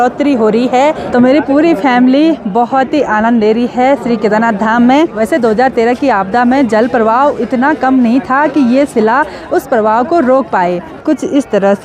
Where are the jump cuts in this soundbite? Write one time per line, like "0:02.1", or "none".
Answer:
0:01.2
0:05.2
0:10.9